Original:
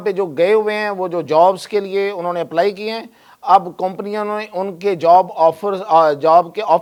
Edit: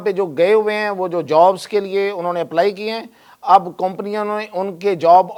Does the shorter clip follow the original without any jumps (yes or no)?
yes